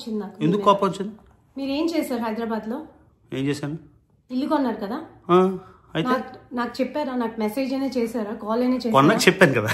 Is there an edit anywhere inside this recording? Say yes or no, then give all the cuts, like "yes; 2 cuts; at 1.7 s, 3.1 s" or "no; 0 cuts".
no; 0 cuts